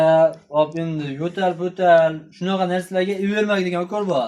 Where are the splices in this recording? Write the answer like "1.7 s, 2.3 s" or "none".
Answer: none